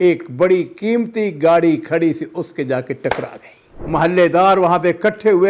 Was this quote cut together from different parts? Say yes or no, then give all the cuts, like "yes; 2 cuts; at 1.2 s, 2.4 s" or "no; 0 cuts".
yes; 1 cut; at 3.8 s